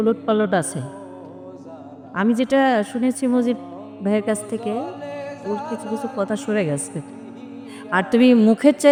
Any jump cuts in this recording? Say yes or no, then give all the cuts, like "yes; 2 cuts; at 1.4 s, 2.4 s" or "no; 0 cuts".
no; 0 cuts